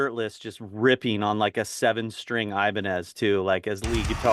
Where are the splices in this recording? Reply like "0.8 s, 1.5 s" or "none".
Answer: none

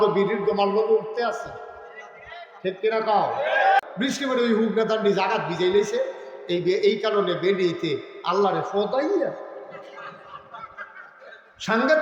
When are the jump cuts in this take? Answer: 3.8 s

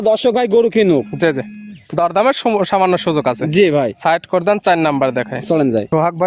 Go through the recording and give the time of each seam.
none

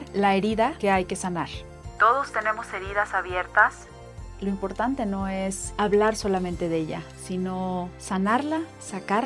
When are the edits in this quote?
none

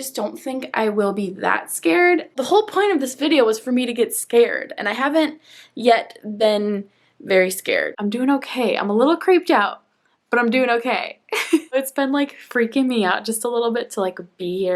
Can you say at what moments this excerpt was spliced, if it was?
2.3 s, 7.9 s, 11.7 s

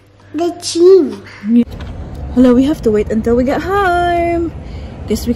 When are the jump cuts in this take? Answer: 1.6 s

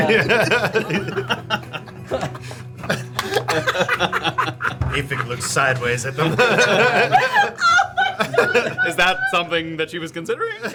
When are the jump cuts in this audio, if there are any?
none

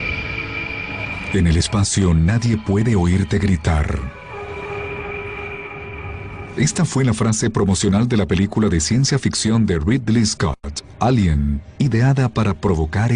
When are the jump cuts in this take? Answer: 6.9 s

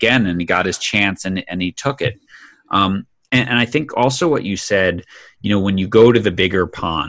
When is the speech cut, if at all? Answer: none

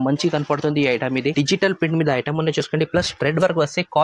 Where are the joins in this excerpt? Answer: 1.3 s

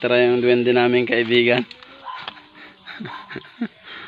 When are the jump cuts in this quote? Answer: 1.8 s

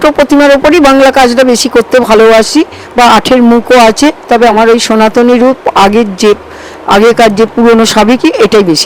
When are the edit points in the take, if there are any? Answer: none

